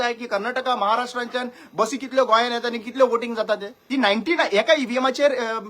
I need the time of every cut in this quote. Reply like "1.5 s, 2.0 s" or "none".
3.8 s